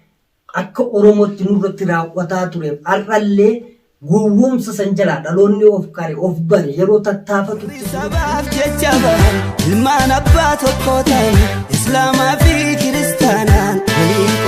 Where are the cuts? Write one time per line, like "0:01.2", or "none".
0:08.1